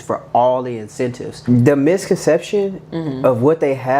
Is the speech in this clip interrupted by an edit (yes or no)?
yes